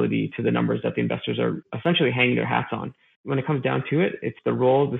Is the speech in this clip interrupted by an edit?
yes; 1 cut; at 3.3 s

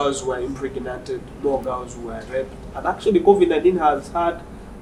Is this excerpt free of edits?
yes; 0 cuts

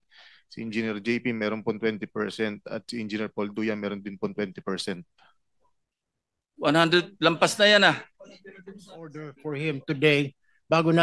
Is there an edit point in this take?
yes; 1 cut; at 9.4 s

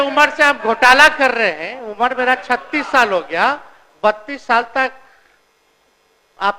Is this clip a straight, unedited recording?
yes; 0 cuts

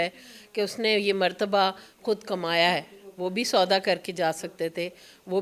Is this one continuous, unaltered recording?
yes; 0 cuts

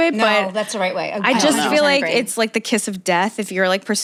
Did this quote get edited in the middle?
no; 0 cuts

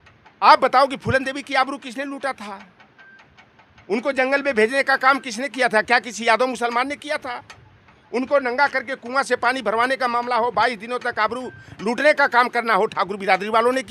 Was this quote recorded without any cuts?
yes; 0 cuts

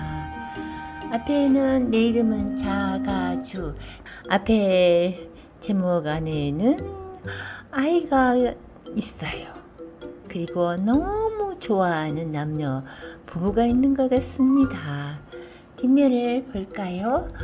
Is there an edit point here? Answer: yes; 1 cut; at 3.9 s

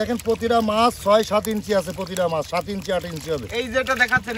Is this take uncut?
yes; 0 cuts

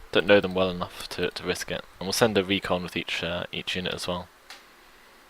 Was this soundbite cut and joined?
yes; 1 cut; at 4.0 s

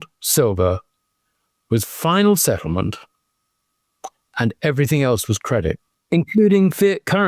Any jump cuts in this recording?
no; 0 cuts

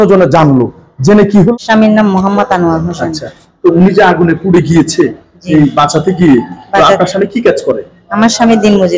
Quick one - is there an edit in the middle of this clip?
yes; 1 cut; at 1.5 s

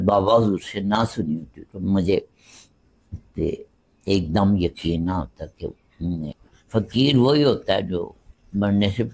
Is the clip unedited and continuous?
no; 1 cut; at 6.5 s

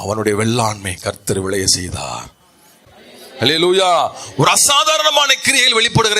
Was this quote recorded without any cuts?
no; 1 cut; at 2.9 s

